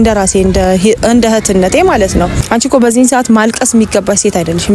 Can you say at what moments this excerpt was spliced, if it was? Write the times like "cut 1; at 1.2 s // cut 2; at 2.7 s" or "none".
cut 1; at 2.4 s

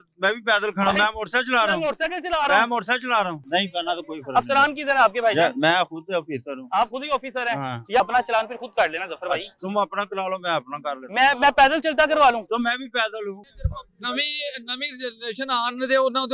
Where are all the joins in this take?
cut 1; at 3.4 s // cut 2; at 8.0 s // cut 3; at 13.4 s

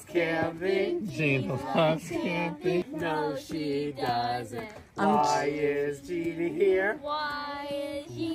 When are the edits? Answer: cut 1; at 2.8 s

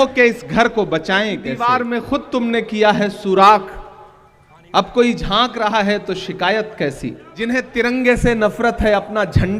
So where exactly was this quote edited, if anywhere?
cut 1; at 1.6 s // cut 2; at 7.3 s

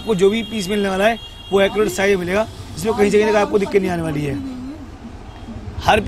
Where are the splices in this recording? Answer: none

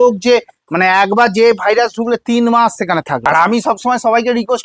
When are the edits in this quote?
cut 1; at 3.2 s

